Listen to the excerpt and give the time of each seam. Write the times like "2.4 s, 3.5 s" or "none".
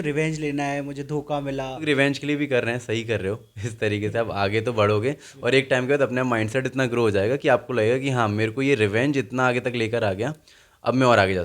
1.8 s

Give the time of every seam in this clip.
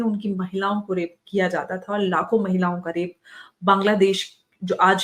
none

